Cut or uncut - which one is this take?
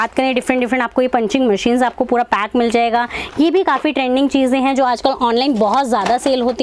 uncut